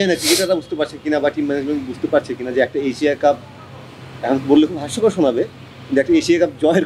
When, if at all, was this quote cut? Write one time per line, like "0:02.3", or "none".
none